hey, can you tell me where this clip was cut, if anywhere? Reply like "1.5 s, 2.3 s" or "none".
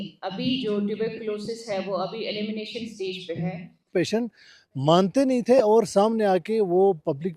3.9 s